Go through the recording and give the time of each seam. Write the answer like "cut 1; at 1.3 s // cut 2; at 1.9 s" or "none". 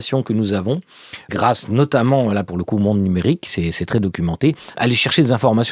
cut 1; at 1.2 s // cut 2; at 4.7 s